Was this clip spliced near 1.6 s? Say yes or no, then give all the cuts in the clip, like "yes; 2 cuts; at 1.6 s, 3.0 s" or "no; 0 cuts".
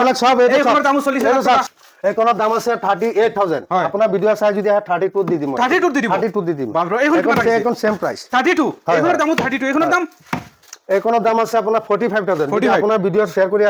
yes; 1 cut; at 1.6 s